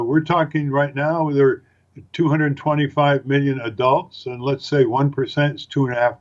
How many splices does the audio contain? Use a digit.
1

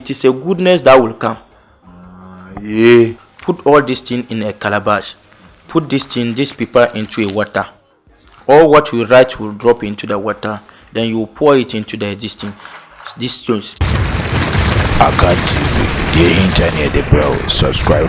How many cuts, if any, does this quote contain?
2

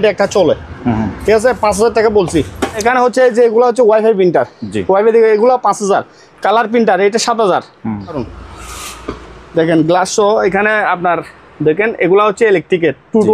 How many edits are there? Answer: 2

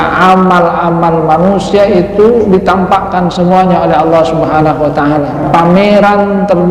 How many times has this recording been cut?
1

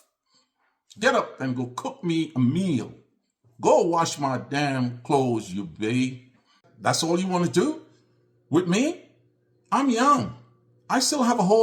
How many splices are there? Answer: 1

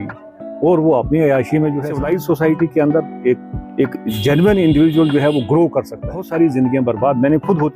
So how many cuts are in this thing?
2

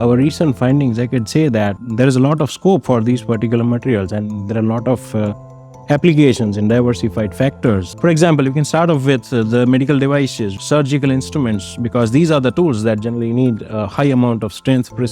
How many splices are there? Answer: 3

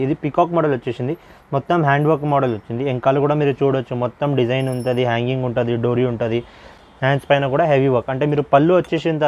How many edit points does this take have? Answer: 0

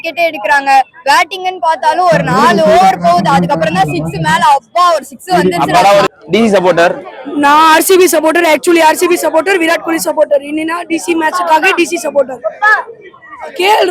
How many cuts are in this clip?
1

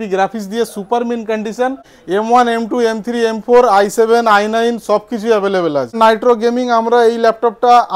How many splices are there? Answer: 2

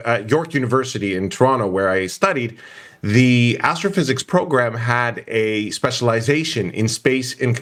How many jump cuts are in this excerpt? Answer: 0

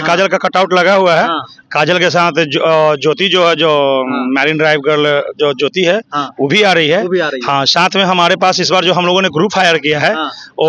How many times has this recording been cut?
1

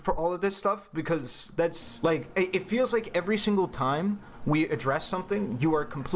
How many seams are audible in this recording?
1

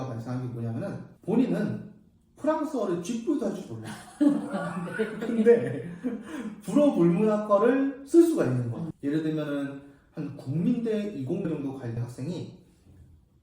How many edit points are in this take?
1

